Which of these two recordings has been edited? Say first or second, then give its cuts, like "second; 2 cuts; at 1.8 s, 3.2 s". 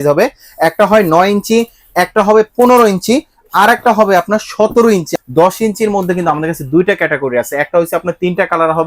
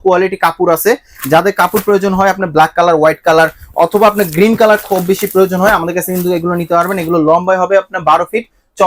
first; 1 cut; at 5.1 s